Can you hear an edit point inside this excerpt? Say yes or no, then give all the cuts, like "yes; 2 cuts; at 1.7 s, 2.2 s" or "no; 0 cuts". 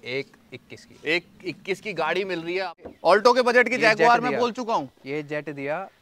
yes; 1 cut; at 2.8 s